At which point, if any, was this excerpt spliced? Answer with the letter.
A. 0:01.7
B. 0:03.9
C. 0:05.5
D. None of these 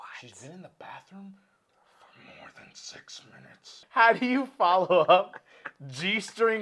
B